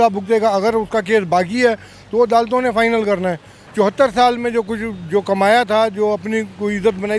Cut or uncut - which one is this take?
cut